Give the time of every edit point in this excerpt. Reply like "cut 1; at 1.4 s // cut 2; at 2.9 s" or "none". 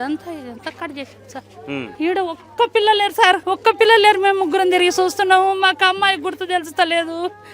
cut 1; at 1.9 s // cut 2; at 3.4 s